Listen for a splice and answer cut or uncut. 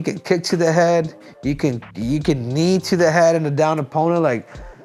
uncut